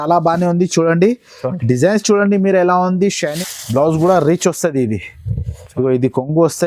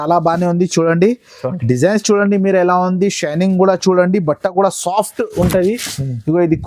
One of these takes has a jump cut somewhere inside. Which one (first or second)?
first